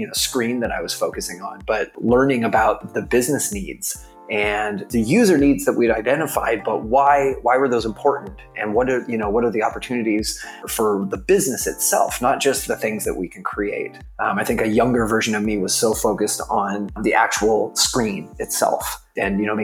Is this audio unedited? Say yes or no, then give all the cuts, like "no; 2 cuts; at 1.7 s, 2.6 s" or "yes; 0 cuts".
no; 2 cuts; at 4.9 s, 6.6 s